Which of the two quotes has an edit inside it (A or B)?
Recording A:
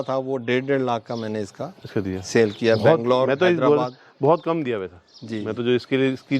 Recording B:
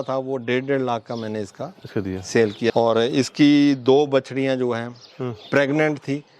B